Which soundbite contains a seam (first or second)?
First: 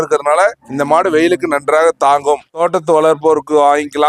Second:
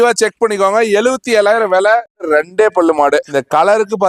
second